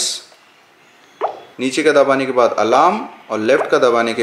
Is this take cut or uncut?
cut